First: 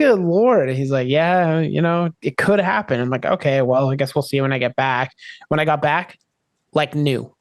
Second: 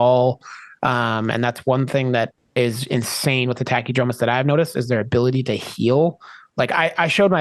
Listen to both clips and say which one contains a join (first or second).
second